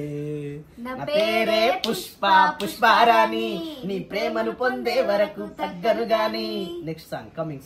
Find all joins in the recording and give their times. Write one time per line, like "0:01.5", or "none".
none